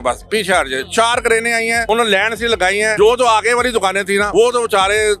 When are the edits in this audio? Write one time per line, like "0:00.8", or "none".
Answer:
0:01.8
0:02.9
0:04.3